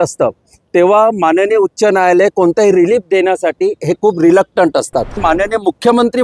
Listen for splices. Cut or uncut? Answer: cut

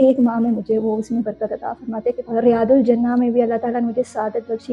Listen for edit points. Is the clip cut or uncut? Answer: cut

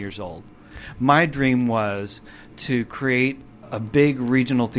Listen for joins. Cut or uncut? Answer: cut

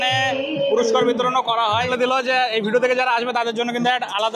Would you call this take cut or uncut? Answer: cut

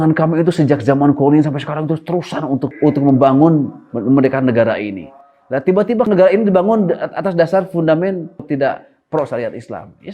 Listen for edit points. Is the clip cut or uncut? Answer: cut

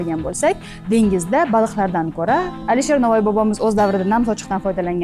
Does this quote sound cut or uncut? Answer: cut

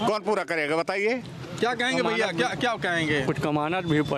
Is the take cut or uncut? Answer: uncut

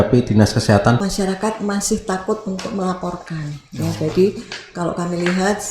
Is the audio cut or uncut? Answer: cut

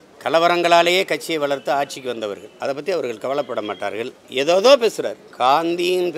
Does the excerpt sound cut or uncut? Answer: uncut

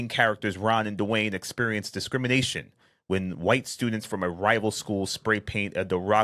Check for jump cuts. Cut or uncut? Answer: uncut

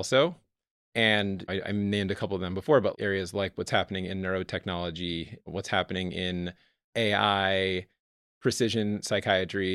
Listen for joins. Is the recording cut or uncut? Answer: cut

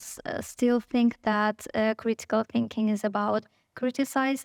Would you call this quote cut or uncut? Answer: uncut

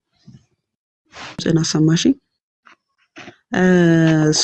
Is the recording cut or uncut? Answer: cut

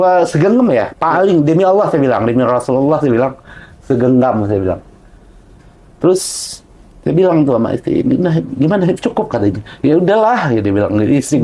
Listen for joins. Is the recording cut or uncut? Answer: uncut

